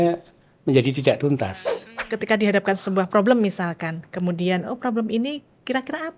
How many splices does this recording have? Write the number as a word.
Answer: one